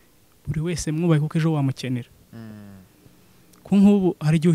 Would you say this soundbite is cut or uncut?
uncut